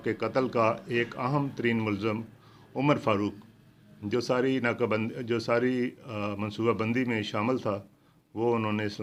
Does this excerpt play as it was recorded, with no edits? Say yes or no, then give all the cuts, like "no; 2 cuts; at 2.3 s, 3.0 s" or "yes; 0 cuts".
yes; 0 cuts